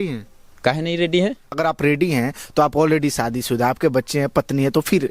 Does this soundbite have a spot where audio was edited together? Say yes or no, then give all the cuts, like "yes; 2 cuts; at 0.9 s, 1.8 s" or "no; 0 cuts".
yes; 1 cut; at 1.6 s